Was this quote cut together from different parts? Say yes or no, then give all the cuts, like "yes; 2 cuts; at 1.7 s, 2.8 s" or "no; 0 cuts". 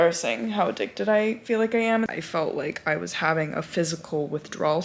yes; 1 cut; at 2.1 s